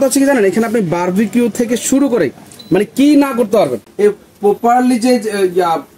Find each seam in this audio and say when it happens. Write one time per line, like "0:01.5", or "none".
0:03.8